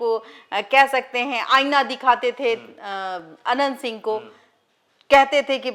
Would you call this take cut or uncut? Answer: uncut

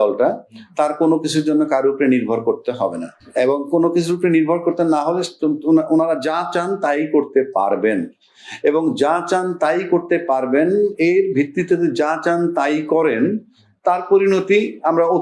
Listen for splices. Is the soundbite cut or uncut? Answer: uncut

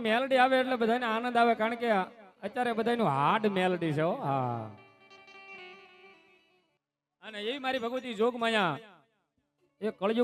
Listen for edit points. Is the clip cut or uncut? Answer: uncut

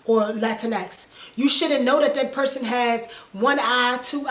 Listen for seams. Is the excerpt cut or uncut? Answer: uncut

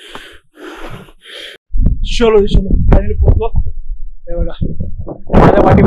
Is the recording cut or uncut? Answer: cut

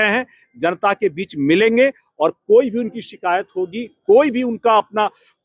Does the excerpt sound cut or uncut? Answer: uncut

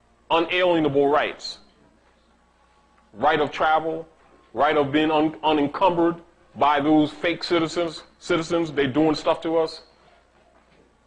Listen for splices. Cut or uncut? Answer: uncut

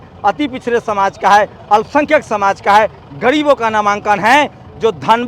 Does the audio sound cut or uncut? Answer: uncut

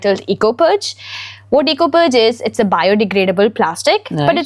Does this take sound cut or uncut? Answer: uncut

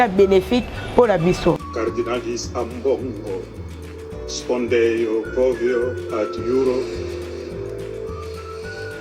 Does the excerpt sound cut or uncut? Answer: cut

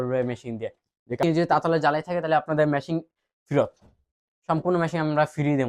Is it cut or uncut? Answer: cut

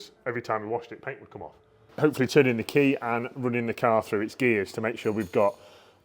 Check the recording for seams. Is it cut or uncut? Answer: cut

